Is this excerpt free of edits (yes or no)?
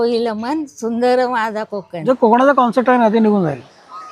no